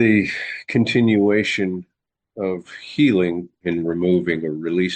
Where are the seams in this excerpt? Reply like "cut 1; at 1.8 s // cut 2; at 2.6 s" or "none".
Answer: cut 1; at 3.5 s